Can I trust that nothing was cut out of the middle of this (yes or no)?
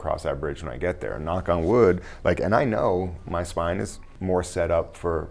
no